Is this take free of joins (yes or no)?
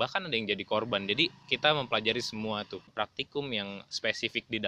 no